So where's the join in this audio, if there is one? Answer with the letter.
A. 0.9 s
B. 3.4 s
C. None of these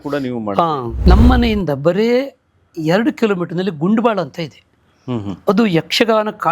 A